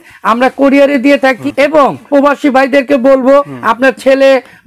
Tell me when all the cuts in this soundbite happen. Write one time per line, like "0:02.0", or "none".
0:01.9
0:03.6